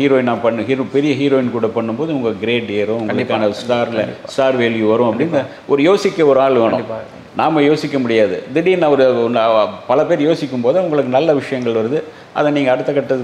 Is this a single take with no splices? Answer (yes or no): yes